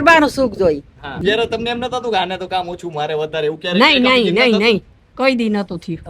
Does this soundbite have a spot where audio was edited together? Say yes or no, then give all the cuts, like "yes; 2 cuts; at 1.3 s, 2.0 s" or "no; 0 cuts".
yes; 1 cut; at 1.0 s